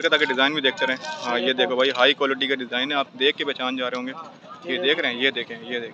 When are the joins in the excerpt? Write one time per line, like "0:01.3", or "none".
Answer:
none

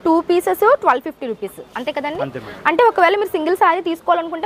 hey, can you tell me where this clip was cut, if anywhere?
none

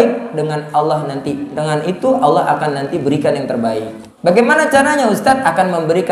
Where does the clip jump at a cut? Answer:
0:04.0

